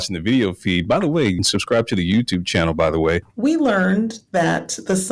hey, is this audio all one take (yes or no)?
no